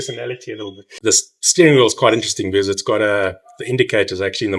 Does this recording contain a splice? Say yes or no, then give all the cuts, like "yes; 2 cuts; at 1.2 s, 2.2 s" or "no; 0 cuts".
yes; 1 cut; at 0.9 s